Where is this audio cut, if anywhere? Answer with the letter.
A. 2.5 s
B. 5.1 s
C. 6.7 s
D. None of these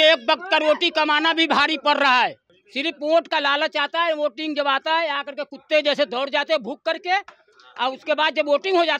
A